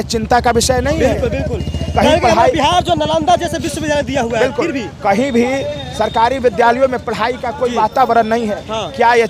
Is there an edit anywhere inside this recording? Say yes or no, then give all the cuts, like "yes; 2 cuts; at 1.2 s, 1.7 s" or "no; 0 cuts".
no; 0 cuts